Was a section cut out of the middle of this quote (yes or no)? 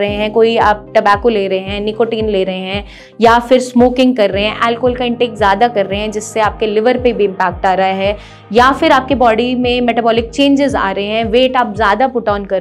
no